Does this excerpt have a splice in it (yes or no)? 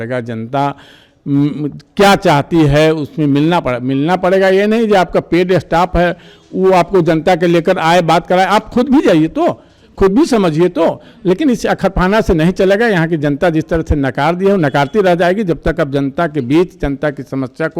no